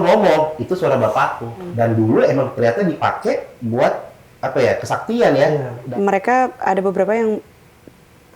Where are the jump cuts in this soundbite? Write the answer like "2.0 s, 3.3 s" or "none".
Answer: 1.6 s, 5.8 s